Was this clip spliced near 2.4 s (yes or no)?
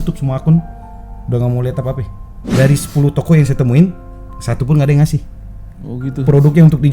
yes